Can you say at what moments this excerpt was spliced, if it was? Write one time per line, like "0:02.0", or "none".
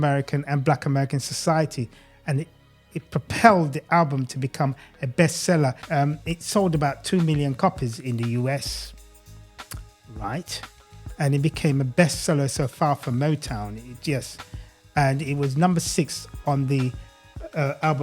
0:05.8